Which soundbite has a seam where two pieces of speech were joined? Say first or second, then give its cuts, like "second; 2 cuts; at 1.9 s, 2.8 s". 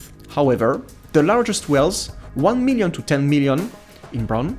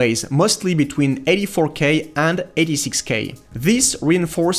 second; 1 cut; at 3.4 s